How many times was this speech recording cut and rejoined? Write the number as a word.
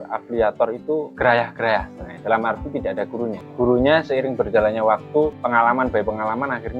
two